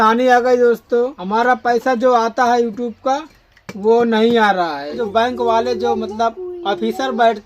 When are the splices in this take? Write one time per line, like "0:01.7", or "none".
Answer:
0:01.2
0:05.0